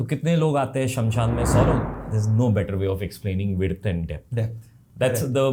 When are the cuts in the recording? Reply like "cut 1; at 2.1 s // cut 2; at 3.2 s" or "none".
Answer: none